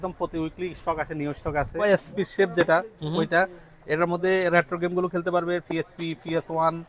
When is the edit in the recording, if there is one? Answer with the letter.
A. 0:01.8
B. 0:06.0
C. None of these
A